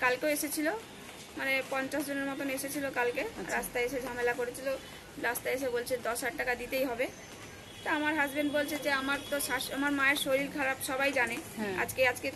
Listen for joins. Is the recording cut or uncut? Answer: uncut